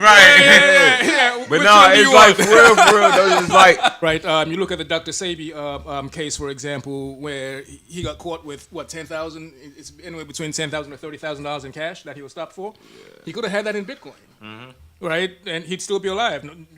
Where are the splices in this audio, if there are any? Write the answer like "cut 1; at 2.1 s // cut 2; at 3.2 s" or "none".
cut 1; at 4.0 s